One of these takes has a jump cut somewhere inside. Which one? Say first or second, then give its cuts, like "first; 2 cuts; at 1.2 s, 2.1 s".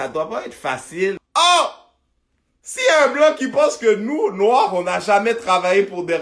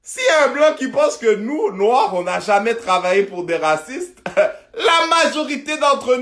first; 1 cut; at 1.2 s